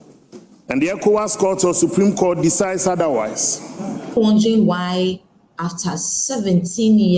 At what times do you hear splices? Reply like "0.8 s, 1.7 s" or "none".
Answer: 4.2 s